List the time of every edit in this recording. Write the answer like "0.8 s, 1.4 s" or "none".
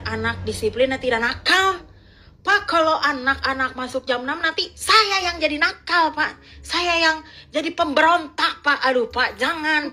none